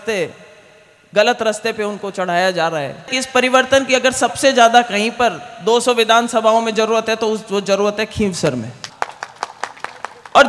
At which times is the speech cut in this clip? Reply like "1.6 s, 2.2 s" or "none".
3.2 s, 8.9 s